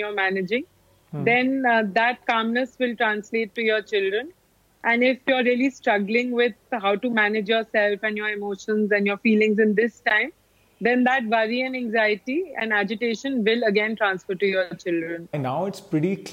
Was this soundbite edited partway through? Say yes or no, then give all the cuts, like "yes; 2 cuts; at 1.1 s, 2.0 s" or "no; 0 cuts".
yes; 1 cut; at 15.4 s